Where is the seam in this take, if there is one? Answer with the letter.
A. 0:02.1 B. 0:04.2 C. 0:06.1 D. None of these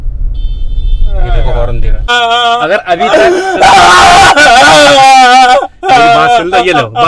A